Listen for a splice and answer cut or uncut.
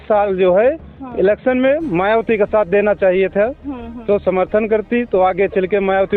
uncut